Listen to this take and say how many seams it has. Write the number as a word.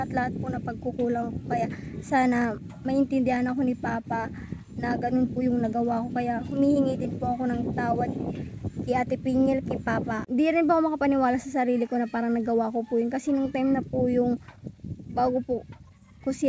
one